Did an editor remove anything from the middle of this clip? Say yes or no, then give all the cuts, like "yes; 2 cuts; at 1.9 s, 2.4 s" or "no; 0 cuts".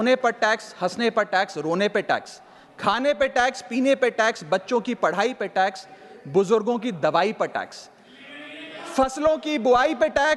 no; 0 cuts